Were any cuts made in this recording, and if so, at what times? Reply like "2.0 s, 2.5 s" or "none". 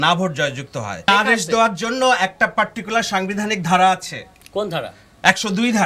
1.1 s